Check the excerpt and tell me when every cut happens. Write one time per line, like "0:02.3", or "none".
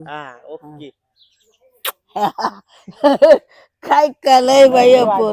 none